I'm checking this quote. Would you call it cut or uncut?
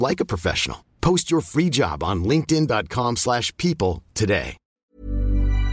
cut